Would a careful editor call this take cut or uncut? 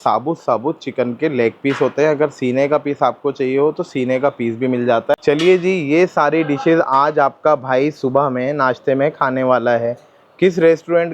cut